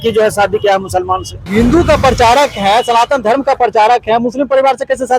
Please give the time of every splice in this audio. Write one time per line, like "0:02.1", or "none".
0:01.5